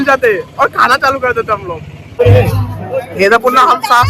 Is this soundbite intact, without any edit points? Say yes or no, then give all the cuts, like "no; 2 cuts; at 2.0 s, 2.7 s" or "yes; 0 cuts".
no; 1 cut; at 2.0 s